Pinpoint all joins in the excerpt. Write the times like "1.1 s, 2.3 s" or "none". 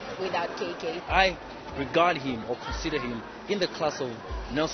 1.0 s